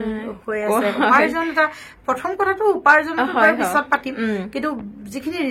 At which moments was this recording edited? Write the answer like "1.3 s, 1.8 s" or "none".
none